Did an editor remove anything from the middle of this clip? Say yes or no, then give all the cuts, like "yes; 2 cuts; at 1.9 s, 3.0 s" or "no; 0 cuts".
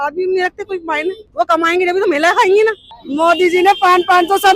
yes; 1 cut; at 2.8 s